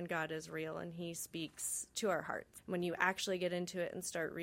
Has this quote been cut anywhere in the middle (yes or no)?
yes